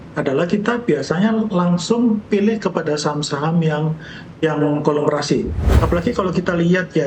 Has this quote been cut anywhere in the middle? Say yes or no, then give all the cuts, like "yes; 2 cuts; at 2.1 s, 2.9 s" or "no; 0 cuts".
yes; 1 cut; at 5.6 s